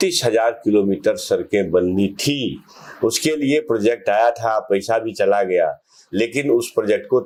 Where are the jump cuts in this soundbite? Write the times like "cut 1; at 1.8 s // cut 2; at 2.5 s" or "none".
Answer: none